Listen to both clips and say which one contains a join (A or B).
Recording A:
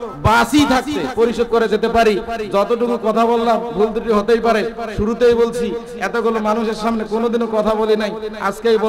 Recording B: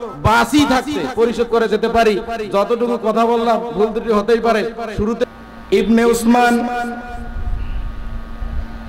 B